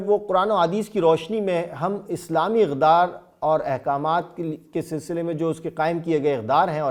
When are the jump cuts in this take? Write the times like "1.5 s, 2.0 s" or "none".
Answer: none